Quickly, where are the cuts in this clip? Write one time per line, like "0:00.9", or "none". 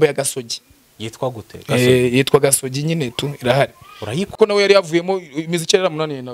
0:04.4